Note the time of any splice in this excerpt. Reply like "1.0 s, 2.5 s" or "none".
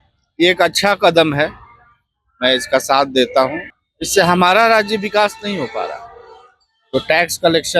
3.7 s